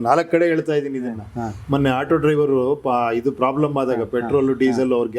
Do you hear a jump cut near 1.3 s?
no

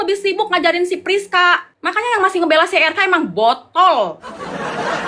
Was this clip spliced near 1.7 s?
yes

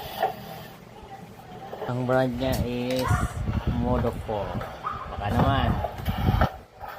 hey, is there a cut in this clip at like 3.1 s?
no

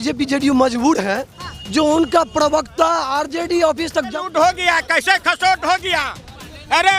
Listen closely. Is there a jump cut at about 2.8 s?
no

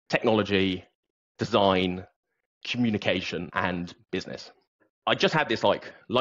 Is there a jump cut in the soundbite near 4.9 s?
yes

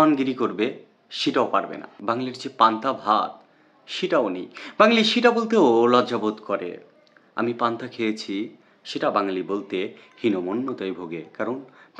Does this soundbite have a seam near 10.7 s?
no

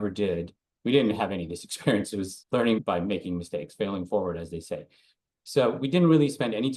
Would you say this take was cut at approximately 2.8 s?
yes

